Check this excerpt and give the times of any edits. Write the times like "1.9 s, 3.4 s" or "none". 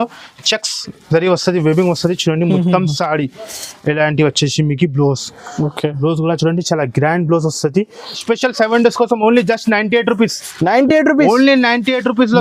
8.2 s